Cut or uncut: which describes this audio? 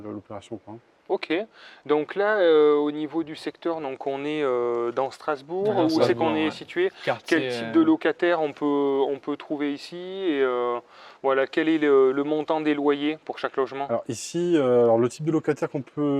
uncut